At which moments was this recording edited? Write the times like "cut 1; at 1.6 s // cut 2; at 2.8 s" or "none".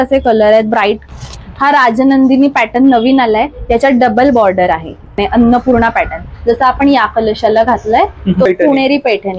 cut 1; at 1.0 s // cut 2; at 5.2 s // cut 3; at 8.5 s

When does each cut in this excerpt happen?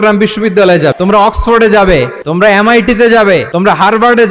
cut 1; at 0.9 s // cut 2; at 2.2 s // cut 3; at 3.5 s

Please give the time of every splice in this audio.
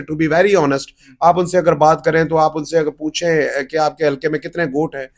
none

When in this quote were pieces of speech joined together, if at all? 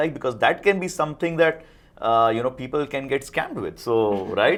none

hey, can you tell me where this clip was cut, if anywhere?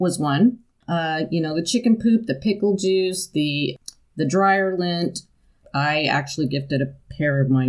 cut 1; at 0.8 s // cut 2; at 3.8 s // cut 3; at 5.6 s

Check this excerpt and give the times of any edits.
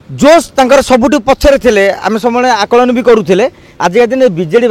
none

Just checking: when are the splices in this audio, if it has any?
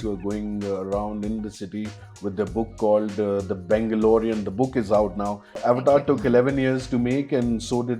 cut 1; at 5.5 s

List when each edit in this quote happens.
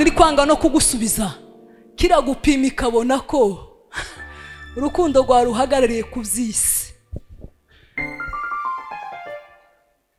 none

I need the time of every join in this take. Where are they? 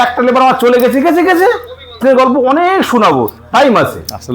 cut 1; at 1.9 s

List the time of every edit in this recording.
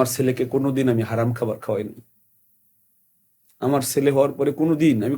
none

